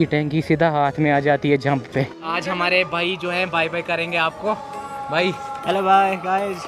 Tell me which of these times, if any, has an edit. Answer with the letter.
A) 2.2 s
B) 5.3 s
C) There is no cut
A